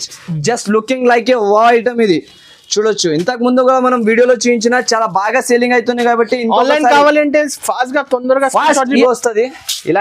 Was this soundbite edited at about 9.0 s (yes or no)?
yes